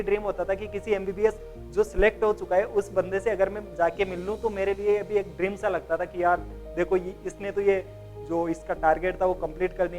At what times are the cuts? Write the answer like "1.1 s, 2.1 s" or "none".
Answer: none